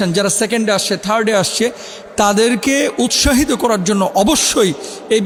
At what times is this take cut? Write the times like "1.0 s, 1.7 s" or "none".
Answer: none